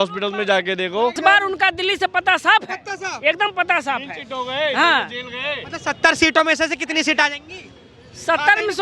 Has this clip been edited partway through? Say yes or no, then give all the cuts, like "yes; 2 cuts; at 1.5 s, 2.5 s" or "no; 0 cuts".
yes; 1 cut; at 1.2 s